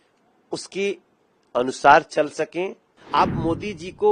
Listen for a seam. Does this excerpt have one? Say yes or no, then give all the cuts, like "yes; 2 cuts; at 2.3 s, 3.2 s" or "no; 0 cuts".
yes; 1 cut; at 2.9 s